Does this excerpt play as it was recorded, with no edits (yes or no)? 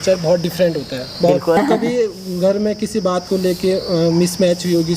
no